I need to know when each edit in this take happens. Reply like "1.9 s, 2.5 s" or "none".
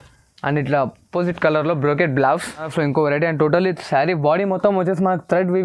2.7 s